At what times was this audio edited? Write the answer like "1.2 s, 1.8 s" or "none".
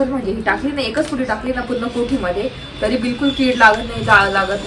none